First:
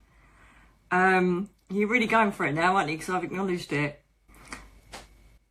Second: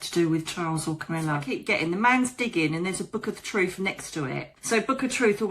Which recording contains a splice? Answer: second; 2 cuts; at 1.5 s, 4.5 s

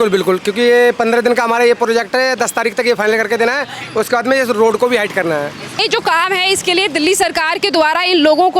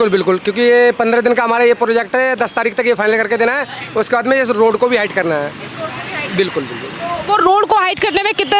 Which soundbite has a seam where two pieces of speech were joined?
first; 1 cut; at 5.8 s

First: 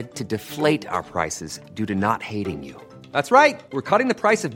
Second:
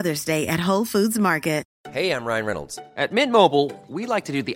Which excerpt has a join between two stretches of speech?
second; 1 cut; at 1.7 s

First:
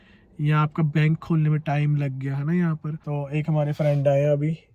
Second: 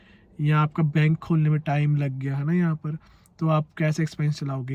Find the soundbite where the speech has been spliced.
first; 1 cut; at 2.9 s

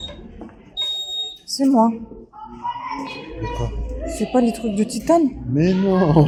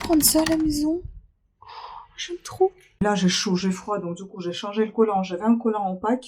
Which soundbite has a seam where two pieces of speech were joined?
second; 1 cut; at 3.0 s

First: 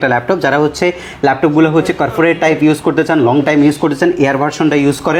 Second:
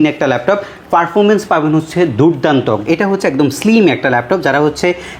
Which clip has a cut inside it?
second; 1 cut; at 2.8 s

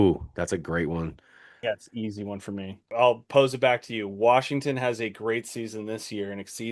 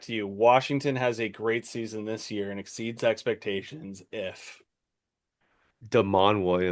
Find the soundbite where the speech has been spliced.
first; 1 cut; at 2.8 s

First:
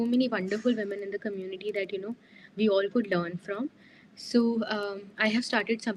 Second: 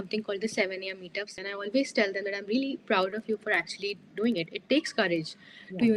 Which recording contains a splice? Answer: second; 1 cut; at 1.4 s

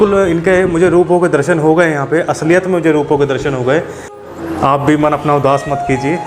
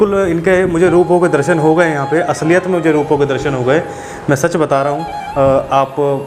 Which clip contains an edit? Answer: first; 1 cut; at 4.2 s

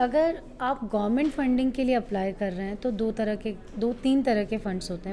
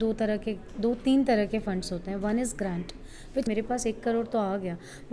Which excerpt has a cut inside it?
second; 1 cut; at 3.5 s

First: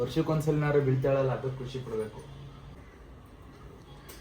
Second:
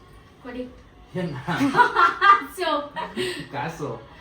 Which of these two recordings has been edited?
first; 1 cut; at 2.8 s

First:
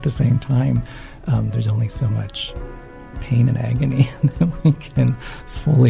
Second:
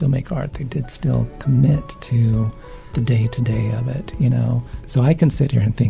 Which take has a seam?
second; 2 cuts; at 2.8 s, 4.7 s

